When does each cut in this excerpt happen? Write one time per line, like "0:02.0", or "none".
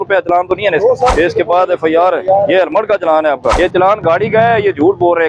0:01.1
0:03.6